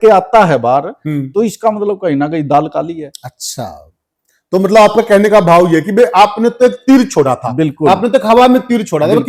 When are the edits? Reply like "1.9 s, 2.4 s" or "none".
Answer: none